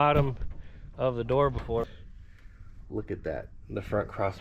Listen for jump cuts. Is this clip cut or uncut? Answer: cut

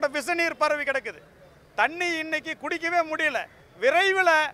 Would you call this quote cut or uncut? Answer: cut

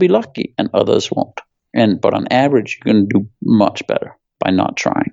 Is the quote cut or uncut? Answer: uncut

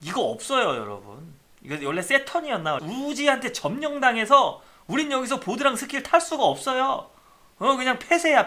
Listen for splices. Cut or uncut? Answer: uncut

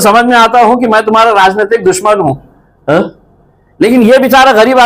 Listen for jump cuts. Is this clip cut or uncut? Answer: uncut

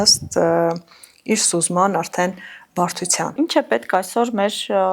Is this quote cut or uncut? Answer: cut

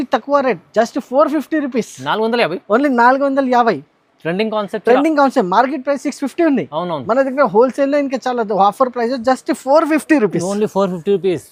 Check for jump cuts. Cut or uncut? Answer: uncut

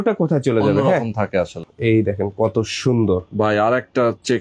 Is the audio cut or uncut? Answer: cut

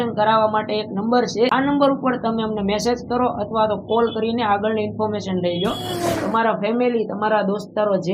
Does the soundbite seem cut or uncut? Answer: cut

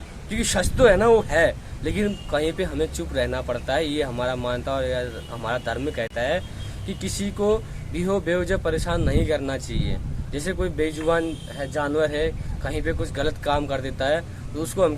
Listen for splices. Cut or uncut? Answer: uncut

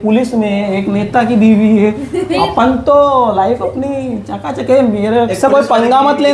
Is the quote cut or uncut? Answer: uncut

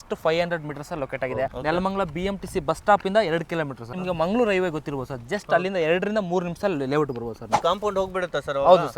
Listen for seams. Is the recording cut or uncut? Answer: cut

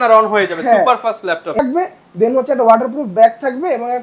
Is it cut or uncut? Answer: cut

